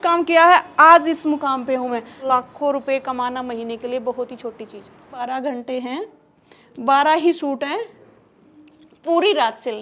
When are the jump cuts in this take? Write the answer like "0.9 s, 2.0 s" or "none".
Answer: 2.2 s, 5.2 s

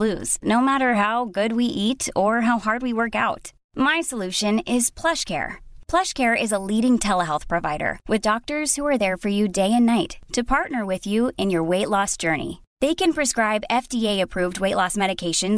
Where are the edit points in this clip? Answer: none

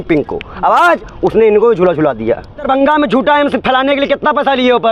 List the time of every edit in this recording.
2.6 s

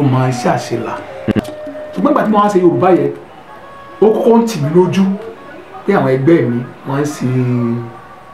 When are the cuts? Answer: 1.3 s

